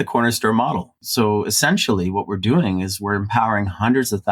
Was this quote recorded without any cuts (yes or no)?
no